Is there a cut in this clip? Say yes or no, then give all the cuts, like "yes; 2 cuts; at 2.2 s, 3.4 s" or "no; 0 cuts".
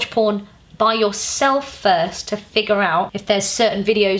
yes; 1 cut; at 3.1 s